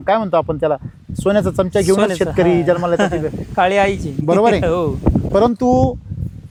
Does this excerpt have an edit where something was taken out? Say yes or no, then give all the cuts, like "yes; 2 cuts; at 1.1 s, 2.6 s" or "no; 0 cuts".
no; 0 cuts